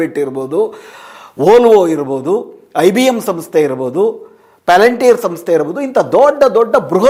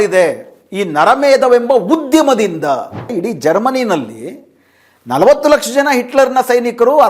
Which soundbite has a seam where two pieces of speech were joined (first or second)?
second